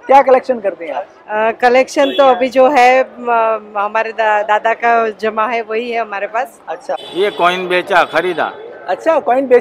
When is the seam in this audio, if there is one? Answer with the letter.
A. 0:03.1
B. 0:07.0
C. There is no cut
B